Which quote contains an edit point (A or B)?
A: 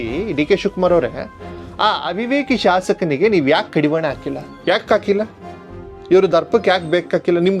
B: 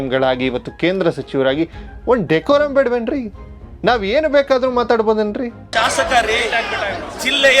B